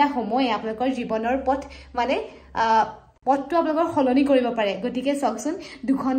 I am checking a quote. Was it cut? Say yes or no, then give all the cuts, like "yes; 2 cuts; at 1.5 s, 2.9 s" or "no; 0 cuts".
no; 0 cuts